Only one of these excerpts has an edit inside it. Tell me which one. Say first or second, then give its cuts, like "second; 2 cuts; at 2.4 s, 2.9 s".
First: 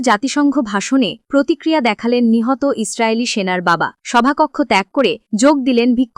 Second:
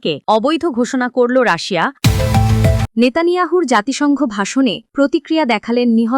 second; 1 cut; at 1.9 s